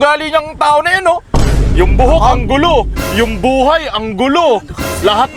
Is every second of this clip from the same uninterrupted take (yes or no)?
yes